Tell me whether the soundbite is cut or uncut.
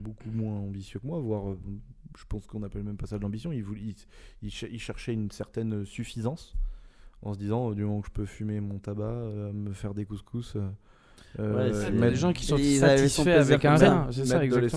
uncut